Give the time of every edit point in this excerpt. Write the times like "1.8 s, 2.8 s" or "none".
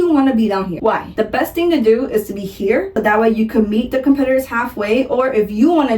1.1 s